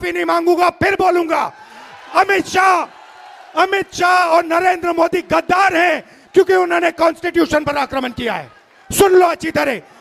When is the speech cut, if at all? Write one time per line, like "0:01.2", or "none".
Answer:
none